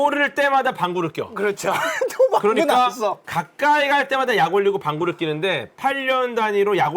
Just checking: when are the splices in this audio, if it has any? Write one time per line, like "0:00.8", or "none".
0:05.7